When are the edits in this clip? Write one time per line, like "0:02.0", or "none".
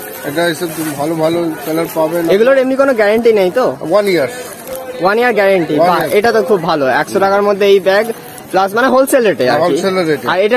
none